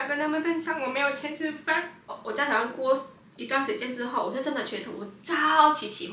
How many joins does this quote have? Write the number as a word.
one